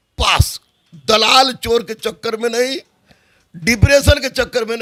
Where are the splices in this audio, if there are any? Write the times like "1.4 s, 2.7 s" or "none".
none